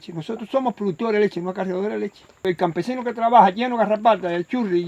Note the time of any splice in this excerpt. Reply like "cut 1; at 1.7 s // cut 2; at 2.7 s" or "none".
cut 1; at 2.4 s